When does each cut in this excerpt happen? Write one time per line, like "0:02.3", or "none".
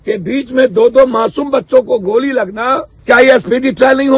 0:02.9